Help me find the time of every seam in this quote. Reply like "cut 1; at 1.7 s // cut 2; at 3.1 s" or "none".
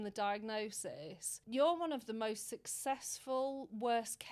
cut 1; at 1.4 s